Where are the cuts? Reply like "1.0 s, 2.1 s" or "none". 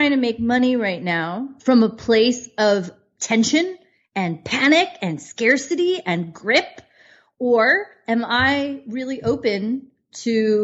1.5 s